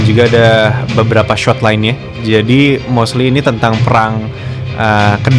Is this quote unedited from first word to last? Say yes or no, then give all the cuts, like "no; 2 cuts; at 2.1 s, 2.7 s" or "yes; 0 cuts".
yes; 0 cuts